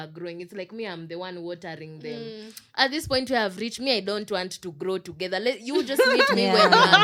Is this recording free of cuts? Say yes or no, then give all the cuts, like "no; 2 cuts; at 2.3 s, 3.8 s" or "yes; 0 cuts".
yes; 0 cuts